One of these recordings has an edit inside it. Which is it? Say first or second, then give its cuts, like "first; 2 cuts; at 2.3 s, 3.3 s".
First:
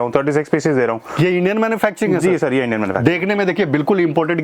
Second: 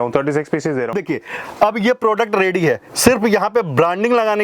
second; 1 cut; at 1.0 s